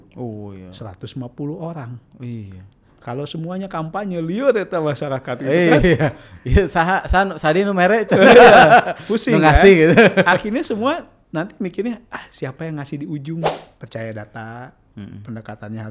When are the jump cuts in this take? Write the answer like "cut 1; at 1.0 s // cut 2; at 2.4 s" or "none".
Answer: cut 1; at 13.7 s